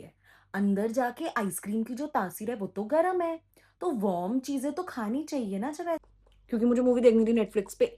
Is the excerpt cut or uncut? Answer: cut